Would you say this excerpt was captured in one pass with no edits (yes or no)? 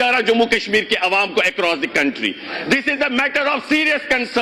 yes